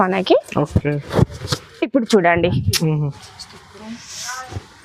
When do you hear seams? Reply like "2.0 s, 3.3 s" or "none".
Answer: none